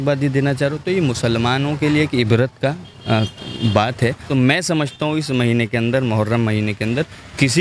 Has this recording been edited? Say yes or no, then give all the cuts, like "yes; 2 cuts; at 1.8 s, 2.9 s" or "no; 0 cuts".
yes; 1 cut; at 4.2 s